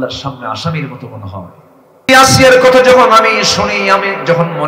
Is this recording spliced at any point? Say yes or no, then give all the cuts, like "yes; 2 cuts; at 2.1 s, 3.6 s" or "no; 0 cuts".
yes; 1 cut; at 2.1 s